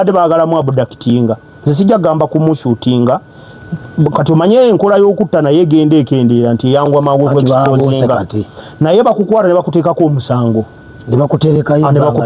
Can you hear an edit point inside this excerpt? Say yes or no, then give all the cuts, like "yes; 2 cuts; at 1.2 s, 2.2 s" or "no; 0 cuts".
no; 0 cuts